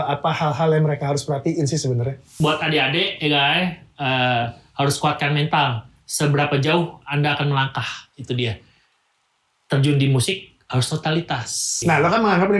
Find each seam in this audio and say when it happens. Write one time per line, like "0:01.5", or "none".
0:02.2
0:11.6